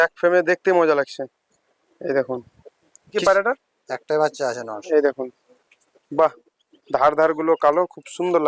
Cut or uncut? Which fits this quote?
cut